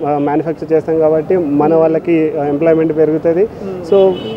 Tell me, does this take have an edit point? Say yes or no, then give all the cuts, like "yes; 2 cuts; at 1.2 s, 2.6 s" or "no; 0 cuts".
no; 0 cuts